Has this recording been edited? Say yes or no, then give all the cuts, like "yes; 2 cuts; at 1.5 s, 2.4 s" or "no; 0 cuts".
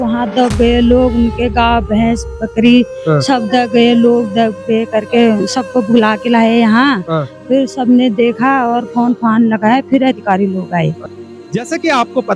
yes; 1 cut; at 11.1 s